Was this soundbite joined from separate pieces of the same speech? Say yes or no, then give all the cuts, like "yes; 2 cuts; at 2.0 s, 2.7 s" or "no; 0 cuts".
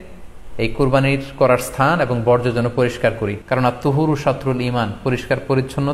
yes; 1 cut; at 3.3 s